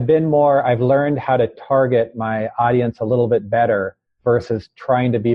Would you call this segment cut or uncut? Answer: uncut